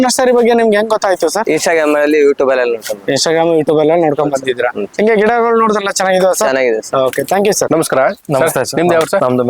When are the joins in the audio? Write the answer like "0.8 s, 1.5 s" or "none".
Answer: none